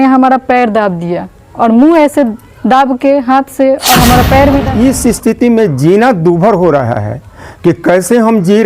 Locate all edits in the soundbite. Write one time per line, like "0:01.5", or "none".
0:04.6